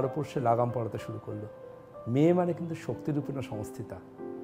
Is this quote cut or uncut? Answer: uncut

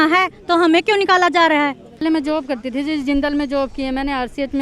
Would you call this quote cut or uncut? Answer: cut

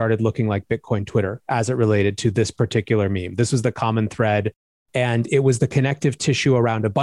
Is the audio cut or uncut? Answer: uncut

